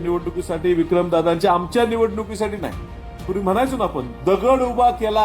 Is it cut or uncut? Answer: cut